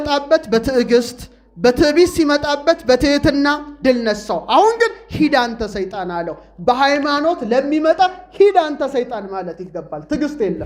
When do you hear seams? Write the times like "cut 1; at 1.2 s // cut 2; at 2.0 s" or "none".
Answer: none